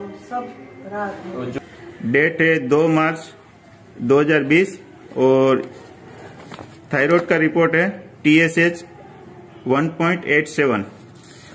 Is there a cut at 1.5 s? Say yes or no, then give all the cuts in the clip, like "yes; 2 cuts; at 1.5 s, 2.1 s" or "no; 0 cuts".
yes; 1 cut; at 1.5 s